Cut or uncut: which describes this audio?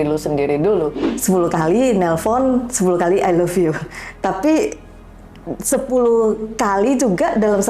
cut